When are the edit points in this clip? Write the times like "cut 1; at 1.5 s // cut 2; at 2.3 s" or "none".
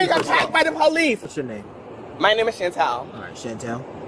cut 1; at 1.2 s